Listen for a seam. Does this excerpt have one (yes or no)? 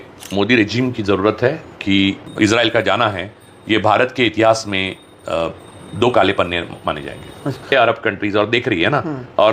yes